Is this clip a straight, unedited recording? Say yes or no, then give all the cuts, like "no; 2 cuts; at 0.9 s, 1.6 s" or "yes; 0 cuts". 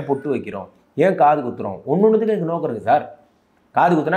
yes; 0 cuts